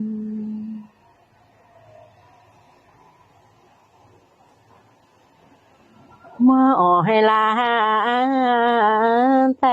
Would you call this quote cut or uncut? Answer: cut